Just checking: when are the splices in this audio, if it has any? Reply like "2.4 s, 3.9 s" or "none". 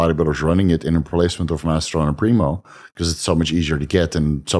none